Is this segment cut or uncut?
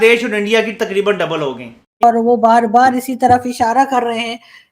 cut